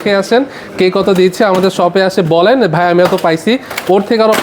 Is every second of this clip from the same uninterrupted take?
yes; 0 cuts

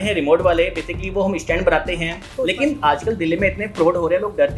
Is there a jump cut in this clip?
yes; 1 cut; at 2.2 s

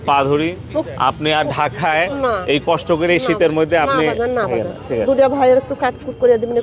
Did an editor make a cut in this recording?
no; 0 cuts

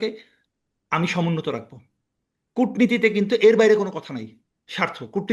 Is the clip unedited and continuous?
yes; 0 cuts

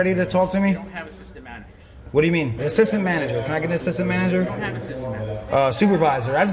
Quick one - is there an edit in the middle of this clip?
yes; 2 cuts; at 2.6 s, 5.4 s

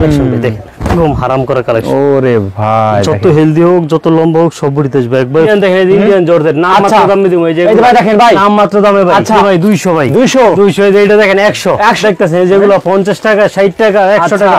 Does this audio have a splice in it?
yes; 3 cuts; at 5.5 s, 9.4 s, 12.0 s

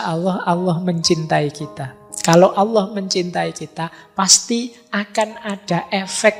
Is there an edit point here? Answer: no; 0 cuts

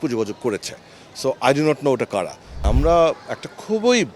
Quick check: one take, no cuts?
no; 1 cut; at 2.5 s

